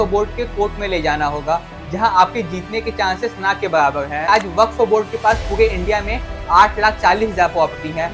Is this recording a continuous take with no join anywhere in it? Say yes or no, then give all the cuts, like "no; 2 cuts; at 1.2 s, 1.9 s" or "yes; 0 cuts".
no; 1 cut; at 4.3 s